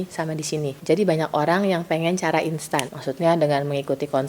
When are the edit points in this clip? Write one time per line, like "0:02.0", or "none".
0:00.8
0:02.9